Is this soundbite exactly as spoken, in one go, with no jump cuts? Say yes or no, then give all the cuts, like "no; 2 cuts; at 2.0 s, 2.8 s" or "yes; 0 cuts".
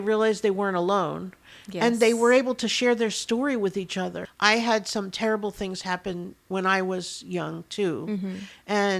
no; 1 cut; at 4.2 s